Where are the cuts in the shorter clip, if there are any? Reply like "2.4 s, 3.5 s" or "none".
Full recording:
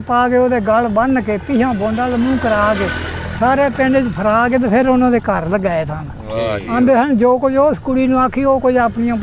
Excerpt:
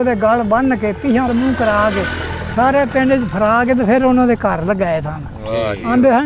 1.3 s